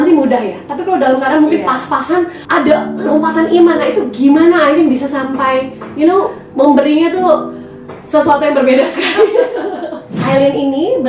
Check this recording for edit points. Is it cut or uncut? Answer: cut